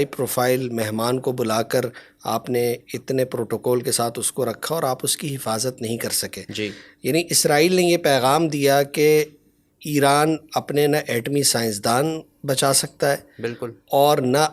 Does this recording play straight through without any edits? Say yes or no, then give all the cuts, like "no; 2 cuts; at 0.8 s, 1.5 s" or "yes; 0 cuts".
yes; 0 cuts